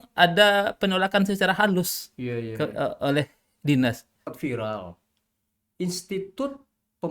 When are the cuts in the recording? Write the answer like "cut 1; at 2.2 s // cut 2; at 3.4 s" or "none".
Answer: cut 1; at 4.3 s